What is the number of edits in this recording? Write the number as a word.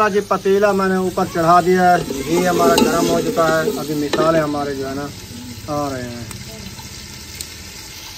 zero